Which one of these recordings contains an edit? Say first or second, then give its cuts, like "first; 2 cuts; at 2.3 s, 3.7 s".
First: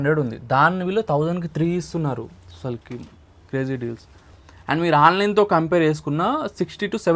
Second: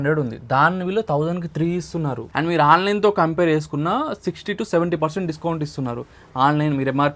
second; 1 cut; at 2.2 s